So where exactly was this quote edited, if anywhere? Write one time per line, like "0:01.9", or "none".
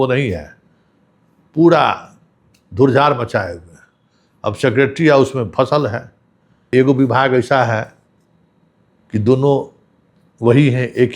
0:06.6